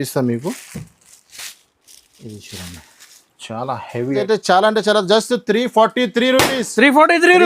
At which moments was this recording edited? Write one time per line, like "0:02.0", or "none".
0:04.2